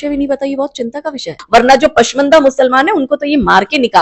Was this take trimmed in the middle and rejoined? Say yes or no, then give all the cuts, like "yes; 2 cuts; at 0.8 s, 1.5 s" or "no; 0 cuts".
yes; 1 cut; at 1.4 s